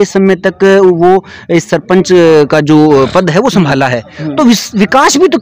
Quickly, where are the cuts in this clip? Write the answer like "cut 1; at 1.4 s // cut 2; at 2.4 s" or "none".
none